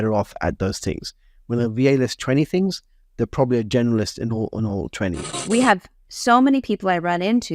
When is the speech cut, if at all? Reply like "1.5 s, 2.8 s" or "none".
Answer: 5.3 s